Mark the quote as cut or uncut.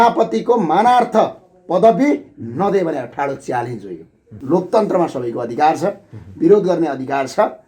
cut